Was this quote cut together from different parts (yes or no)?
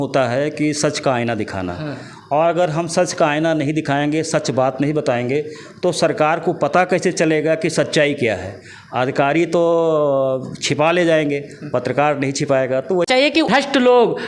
yes